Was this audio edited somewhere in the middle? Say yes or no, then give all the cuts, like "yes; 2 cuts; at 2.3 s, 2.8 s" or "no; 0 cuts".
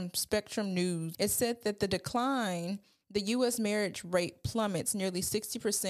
yes; 1 cut; at 1.1 s